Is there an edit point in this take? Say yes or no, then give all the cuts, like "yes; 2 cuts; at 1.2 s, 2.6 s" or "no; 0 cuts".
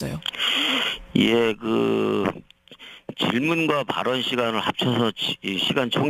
yes; 1 cut; at 4.0 s